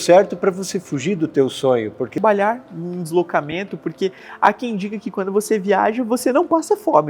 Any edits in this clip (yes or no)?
yes